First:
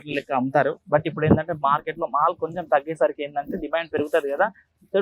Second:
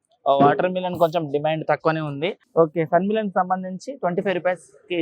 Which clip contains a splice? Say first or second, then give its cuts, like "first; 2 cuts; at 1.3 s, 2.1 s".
second; 1 cut; at 2.4 s